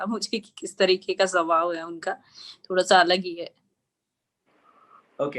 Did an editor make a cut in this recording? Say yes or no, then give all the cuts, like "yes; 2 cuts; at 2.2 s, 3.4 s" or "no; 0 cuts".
no; 0 cuts